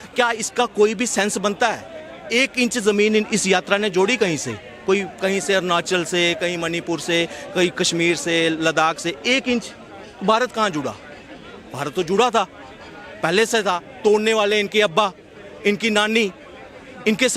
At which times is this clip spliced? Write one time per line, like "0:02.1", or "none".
none